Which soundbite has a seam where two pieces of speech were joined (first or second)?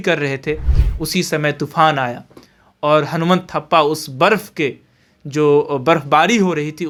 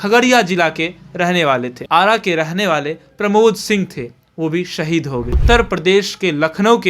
second